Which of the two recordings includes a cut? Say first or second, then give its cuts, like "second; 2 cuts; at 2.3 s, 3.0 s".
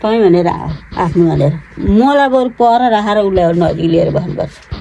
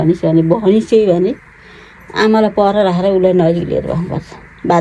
first; 1 cut; at 1.8 s